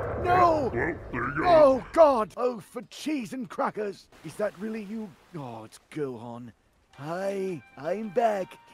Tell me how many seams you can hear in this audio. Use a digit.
0